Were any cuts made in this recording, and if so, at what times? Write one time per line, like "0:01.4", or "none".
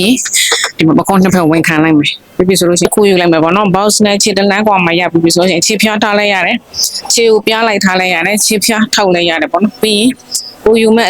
0:02.8